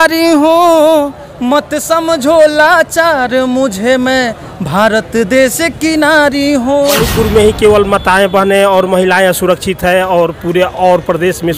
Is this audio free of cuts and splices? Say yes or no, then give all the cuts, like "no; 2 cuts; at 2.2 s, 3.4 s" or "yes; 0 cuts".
no; 1 cut; at 7.0 s